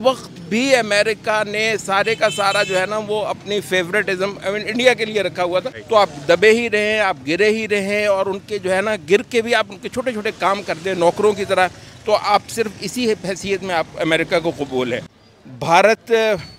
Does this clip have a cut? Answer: yes; 2 cuts; at 5.8 s, 15.2 s

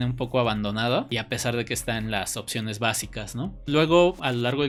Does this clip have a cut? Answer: no; 0 cuts

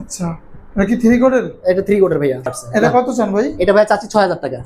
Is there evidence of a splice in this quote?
yes; 1 cut; at 2.5 s

